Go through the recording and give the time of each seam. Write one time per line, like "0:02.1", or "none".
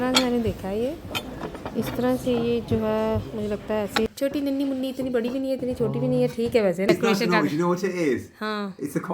0:04.1
0:06.9